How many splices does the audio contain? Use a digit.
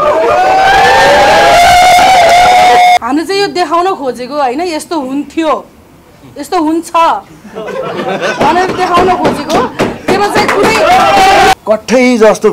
2